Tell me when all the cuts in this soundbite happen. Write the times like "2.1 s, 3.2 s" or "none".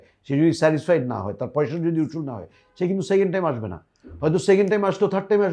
none